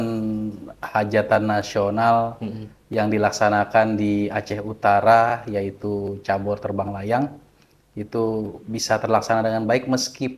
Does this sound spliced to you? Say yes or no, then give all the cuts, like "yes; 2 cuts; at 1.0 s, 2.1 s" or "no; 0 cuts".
no; 0 cuts